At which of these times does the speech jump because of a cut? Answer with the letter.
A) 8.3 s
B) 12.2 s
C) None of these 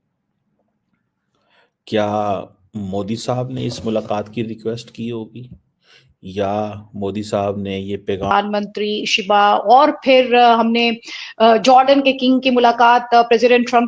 A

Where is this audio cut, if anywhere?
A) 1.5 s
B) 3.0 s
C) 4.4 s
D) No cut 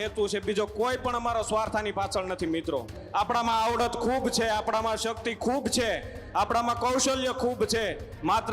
B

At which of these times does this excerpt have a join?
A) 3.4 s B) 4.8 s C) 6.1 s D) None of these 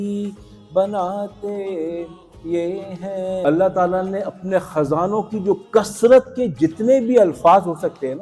A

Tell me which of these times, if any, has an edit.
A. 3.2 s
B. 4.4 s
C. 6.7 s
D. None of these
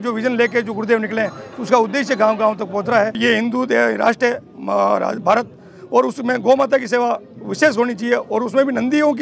A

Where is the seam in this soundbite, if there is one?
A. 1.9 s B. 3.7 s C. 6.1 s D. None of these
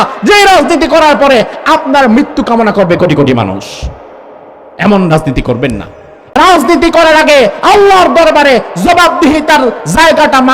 C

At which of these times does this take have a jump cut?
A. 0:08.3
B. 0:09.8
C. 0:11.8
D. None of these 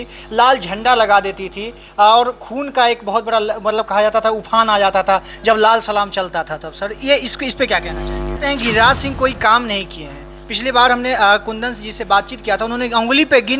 A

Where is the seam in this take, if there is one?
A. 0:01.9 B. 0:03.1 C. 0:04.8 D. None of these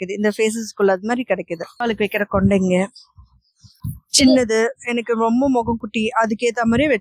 A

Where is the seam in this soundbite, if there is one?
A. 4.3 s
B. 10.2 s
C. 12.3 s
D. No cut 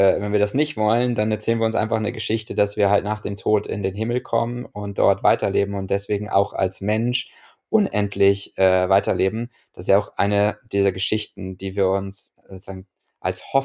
D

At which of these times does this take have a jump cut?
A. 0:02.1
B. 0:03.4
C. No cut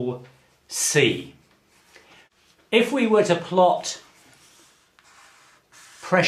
C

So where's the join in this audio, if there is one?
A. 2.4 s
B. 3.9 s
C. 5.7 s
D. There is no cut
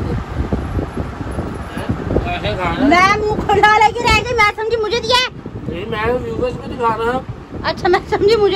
A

